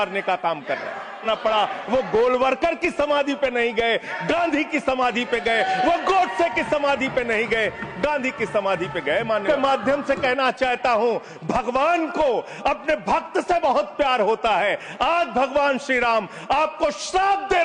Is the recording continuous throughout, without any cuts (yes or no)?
no